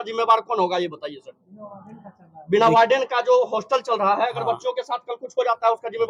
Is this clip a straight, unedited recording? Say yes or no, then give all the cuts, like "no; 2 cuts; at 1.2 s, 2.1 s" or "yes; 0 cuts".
yes; 0 cuts